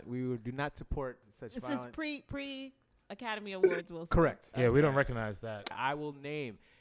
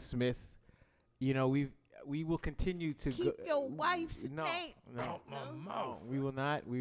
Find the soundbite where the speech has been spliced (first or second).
first